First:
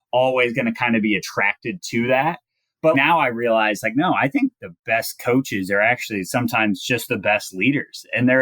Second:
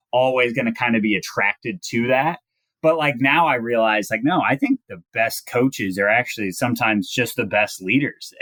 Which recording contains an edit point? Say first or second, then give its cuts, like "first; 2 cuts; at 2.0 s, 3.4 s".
first; 1 cut; at 2.9 s